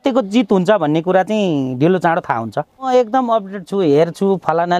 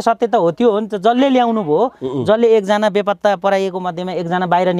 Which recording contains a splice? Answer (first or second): first